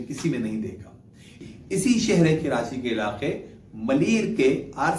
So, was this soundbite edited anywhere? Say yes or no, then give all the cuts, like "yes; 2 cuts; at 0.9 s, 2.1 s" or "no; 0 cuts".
yes; 1 cut; at 1.4 s